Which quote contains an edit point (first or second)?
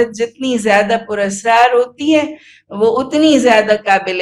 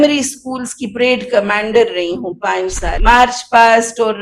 second